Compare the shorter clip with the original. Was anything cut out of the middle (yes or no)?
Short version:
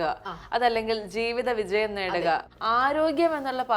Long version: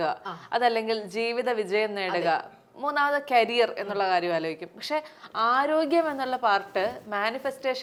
yes